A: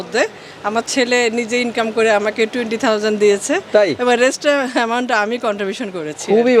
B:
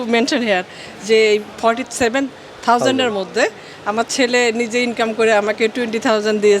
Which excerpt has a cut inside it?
B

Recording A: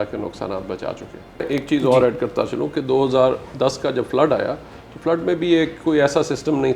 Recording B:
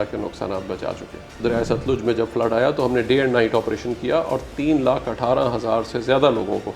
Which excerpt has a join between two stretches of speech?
B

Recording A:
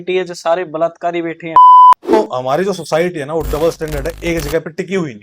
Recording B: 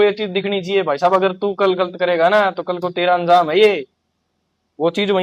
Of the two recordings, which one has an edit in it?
A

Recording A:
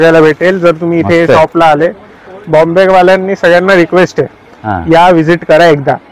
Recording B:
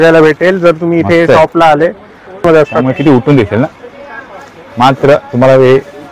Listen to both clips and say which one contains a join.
B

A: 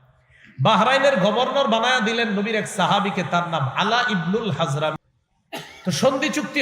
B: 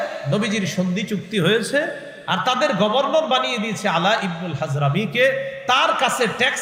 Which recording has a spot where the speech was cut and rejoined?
A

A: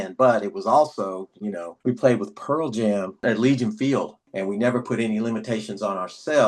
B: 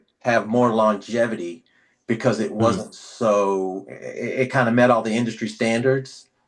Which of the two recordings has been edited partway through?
A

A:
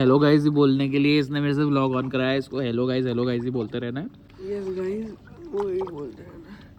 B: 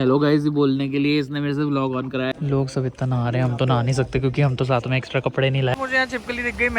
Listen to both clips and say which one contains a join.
B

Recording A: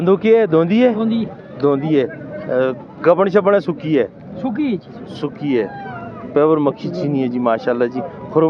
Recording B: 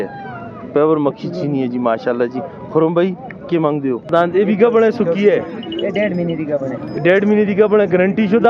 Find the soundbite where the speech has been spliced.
B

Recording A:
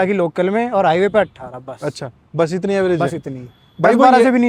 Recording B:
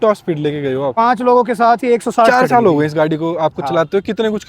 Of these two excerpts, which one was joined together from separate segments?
B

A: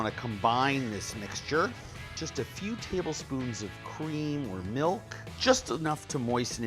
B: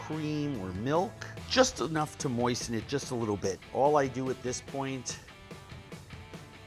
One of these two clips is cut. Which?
A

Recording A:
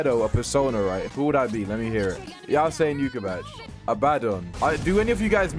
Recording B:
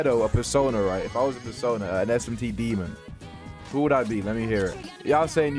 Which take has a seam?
A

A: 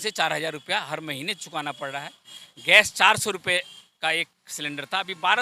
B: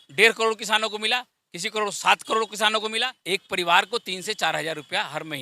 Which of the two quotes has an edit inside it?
B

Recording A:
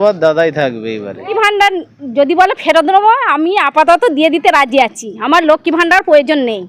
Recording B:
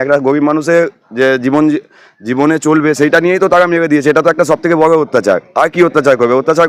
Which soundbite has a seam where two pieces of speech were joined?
A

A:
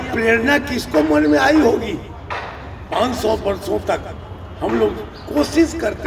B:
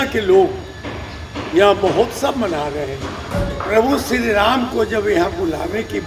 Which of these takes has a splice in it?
B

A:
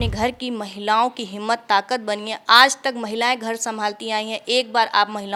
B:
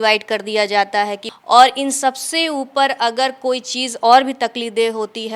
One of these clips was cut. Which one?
B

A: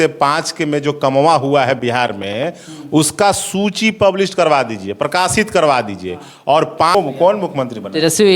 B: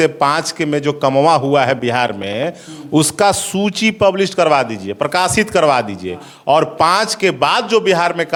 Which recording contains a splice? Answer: A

